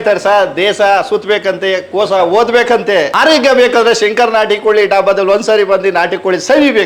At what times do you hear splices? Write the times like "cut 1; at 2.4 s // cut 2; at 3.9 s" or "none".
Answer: none